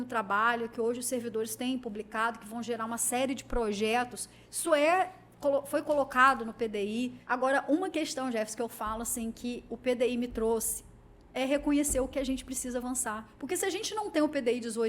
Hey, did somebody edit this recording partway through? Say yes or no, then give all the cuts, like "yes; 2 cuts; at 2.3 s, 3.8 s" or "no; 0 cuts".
yes; 2 cuts; at 7.2 s, 13.3 s